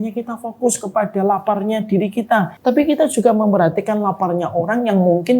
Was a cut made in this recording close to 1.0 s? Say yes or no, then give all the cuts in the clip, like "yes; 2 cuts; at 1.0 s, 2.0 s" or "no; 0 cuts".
no; 1 cut; at 2.5 s